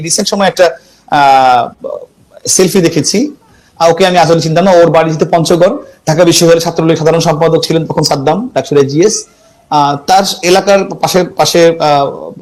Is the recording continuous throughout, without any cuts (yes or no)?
yes